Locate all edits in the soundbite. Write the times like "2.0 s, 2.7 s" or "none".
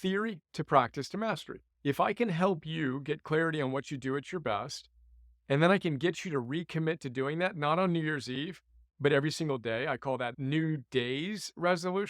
1.6 s, 10.4 s